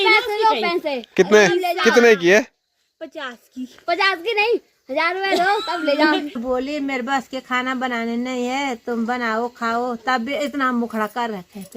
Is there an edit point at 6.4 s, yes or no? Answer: yes